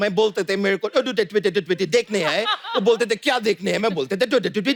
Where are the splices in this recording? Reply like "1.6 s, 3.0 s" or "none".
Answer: none